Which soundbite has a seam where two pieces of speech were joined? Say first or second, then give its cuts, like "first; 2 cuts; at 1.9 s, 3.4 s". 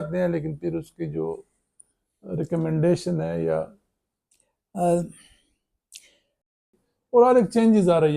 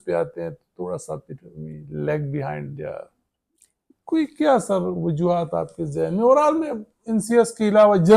first; 1 cut; at 6.6 s